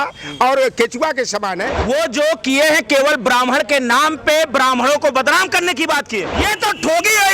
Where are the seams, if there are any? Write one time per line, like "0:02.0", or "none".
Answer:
0:01.7
0:06.3